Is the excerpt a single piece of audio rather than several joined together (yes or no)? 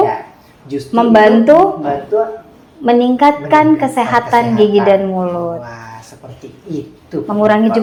yes